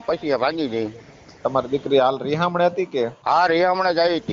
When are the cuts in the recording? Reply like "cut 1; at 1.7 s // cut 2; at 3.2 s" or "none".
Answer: cut 1; at 3.2 s